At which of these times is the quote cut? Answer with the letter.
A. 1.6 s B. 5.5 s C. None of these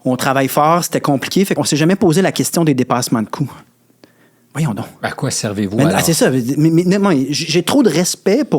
A